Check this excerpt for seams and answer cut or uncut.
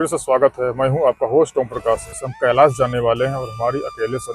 cut